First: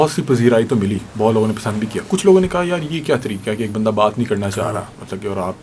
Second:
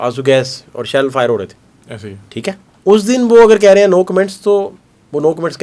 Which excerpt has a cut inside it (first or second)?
second